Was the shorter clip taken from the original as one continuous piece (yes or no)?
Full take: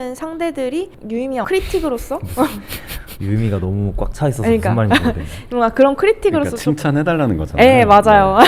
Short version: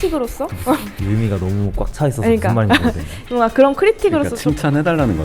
no